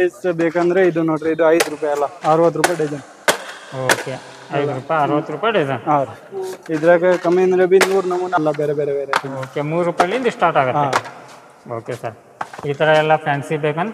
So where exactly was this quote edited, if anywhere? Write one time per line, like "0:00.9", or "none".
0:08.4